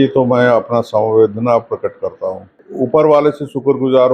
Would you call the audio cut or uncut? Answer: cut